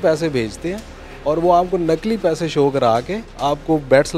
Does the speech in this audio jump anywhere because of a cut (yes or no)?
no